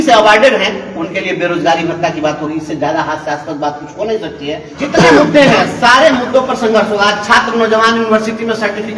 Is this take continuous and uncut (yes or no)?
no